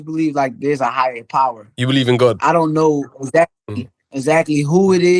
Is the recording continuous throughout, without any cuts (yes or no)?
yes